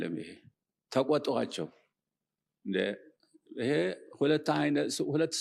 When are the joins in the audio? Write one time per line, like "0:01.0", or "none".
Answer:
none